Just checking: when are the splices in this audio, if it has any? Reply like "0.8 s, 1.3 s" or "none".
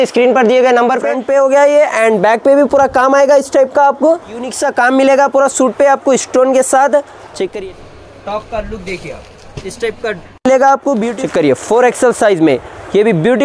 1.1 s, 4.6 s, 7.5 s, 11.1 s